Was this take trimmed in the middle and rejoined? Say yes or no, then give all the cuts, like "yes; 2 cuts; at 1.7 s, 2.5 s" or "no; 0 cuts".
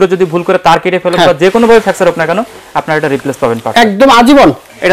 no; 0 cuts